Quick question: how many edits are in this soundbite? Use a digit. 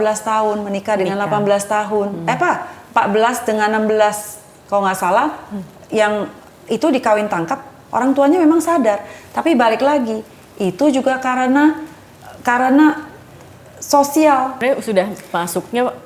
1